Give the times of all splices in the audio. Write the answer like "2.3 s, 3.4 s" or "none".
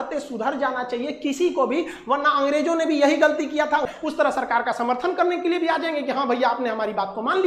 3.9 s